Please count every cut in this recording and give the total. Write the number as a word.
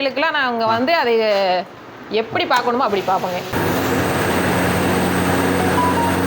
one